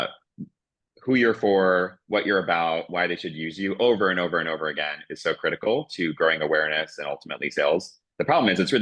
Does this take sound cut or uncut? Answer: uncut